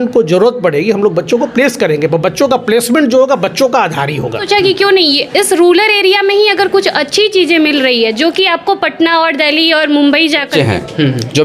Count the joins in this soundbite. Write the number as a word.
two